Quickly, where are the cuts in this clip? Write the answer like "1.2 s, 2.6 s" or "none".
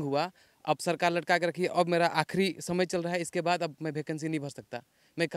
none